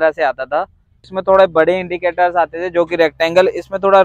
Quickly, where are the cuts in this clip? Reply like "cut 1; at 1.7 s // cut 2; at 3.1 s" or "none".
cut 1; at 1.0 s